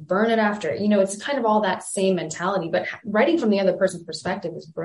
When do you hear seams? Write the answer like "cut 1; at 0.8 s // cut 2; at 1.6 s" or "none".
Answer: none